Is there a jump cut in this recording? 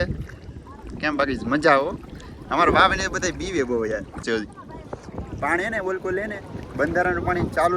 yes; 1 cut; at 4.2 s

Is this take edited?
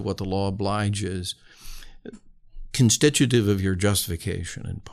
no; 0 cuts

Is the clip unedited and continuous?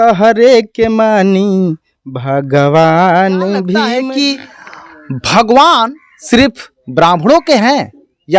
no; 1 cut; at 3.9 s

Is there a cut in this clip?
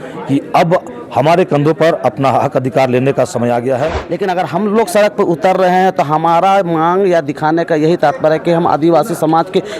yes; 1 cut; at 4.0 s

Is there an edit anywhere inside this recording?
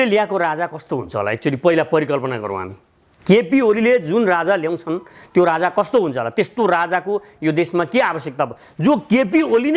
no; 0 cuts

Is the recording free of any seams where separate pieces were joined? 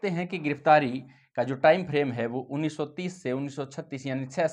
yes; 0 cuts

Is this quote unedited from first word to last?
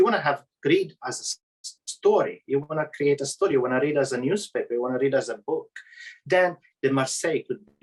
yes; 0 cuts

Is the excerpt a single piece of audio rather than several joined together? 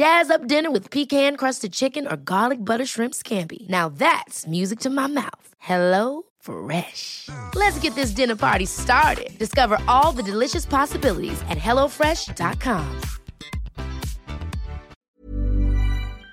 no; 1 cut; at 15.0 s

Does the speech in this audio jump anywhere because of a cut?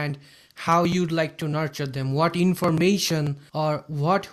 yes; 1 cut; at 3.4 s

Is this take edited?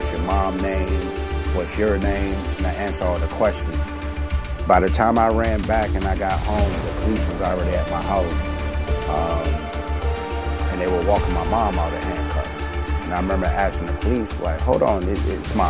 no; 0 cuts

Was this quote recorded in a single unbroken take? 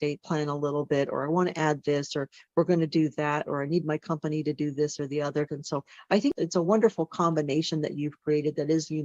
no; 1 cut; at 5.5 s

